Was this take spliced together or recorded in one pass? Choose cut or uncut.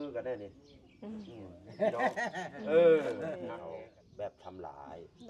cut